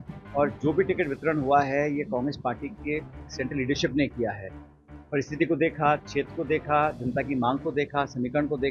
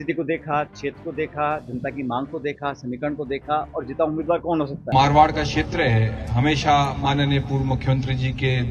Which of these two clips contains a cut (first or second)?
second